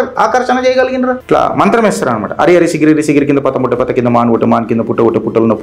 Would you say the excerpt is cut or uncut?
cut